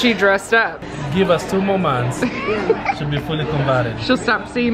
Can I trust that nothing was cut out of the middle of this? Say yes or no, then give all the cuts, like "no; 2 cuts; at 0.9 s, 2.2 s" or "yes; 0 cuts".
no; 1 cut; at 0.9 s